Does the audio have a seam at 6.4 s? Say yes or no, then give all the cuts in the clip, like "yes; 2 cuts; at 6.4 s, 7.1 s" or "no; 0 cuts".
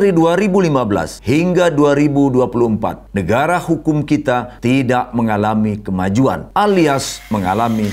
yes; 4 cuts; at 1.1 s, 3.0 s, 4.5 s, 6.4 s